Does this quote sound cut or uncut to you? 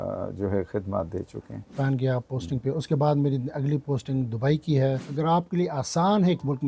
cut